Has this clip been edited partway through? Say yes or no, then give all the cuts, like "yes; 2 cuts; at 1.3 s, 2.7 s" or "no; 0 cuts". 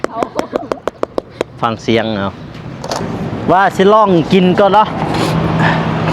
yes; 1 cut; at 3.0 s